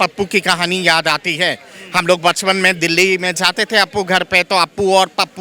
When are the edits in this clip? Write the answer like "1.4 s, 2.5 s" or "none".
none